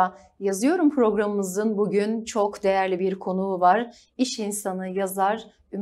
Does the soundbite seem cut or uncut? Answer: uncut